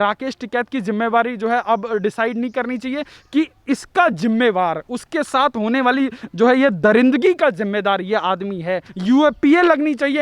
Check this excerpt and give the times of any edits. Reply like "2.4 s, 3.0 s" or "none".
8.9 s